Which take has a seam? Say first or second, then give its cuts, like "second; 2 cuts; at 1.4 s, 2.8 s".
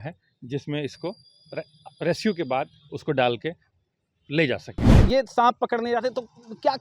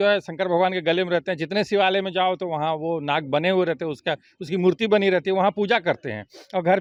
first; 1 cut; at 4.9 s